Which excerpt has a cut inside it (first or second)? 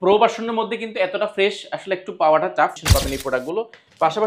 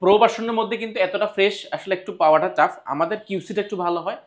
first